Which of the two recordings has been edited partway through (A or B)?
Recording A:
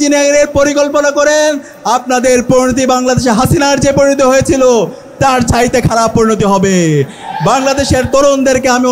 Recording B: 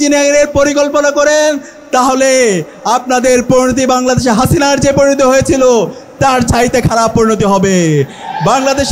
A